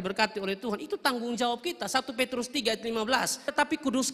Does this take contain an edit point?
no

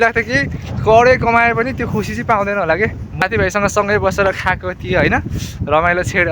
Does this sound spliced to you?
yes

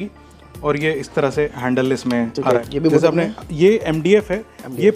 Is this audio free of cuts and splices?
no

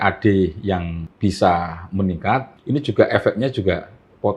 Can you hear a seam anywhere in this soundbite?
yes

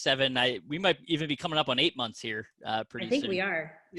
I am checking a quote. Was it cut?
no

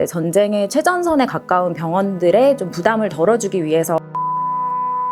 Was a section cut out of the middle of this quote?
no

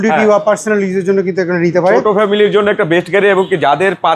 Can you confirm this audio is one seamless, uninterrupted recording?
yes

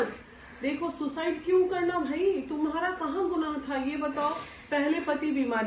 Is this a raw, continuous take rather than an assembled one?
yes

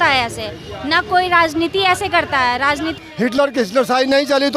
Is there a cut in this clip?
yes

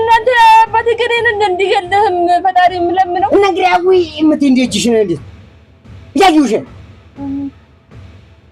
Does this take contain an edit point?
yes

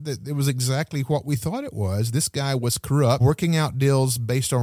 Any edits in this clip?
yes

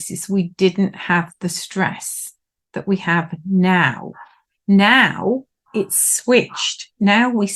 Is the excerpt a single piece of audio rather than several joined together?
yes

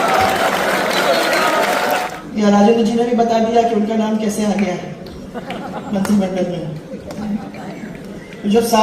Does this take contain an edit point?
yes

